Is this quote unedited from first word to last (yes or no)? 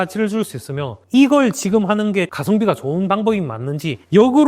no